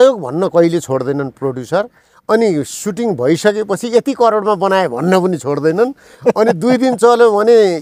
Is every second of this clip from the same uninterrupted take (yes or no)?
yes